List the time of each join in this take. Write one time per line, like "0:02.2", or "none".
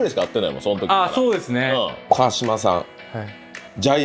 0:02.0